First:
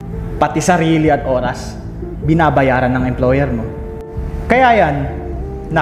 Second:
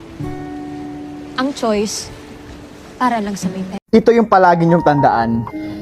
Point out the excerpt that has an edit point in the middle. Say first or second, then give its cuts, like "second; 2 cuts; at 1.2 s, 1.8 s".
second; 1 cut; at 3.8 s